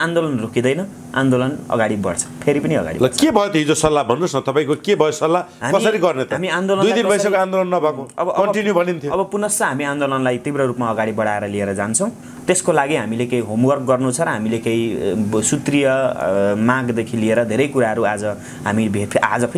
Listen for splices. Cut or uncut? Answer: uncut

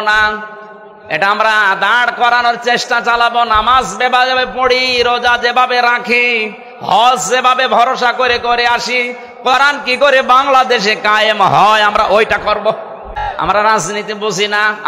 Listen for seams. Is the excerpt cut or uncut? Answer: cut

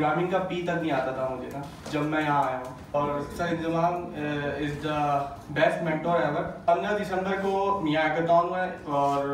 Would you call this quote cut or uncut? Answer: cut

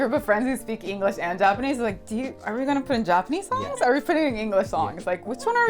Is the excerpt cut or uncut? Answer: uncut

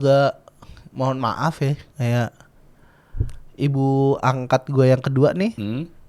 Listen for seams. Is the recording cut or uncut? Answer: uncut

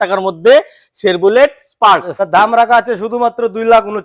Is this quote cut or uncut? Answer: cut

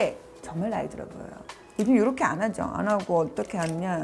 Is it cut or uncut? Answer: cut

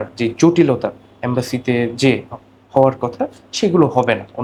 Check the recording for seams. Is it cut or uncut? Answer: uncut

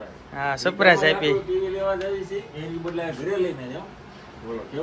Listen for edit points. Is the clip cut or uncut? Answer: uncut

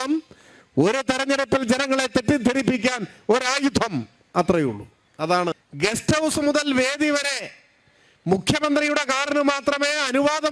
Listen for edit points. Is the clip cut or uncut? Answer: cut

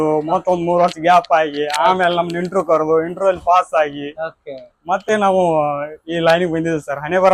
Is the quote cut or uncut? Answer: uncut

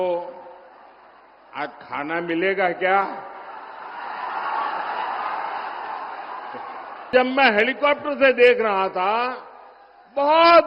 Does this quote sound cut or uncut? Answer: cut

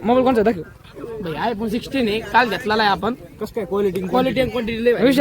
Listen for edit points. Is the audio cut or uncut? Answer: uncut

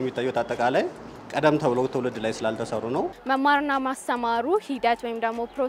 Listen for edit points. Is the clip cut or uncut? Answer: cut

